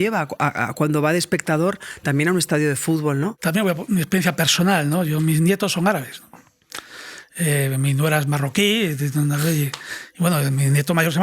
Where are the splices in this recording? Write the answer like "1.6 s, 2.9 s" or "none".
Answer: 3.4 s